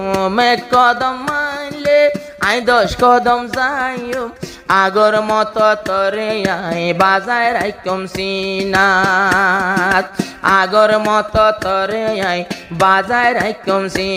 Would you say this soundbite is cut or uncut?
uncut